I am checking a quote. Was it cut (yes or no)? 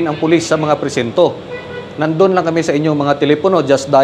no